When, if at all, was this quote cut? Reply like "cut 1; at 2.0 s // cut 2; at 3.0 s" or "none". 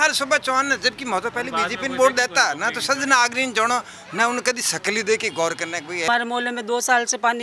cut 1; at 6.1 s